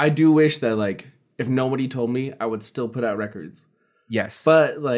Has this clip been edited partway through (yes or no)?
no